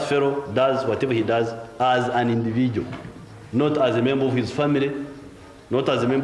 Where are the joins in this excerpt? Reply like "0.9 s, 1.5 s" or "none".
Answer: none